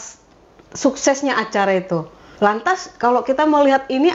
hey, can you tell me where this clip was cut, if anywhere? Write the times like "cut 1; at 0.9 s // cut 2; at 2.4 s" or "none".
cut 1; at 2.2 s